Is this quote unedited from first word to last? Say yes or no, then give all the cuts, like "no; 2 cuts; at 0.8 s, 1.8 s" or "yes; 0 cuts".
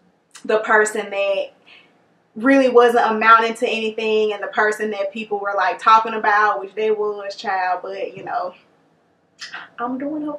yes; 0 cuts